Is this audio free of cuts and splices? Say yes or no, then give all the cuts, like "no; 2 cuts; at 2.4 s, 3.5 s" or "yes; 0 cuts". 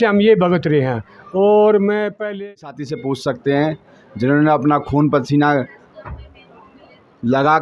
no; 1 cut; at 2.3 s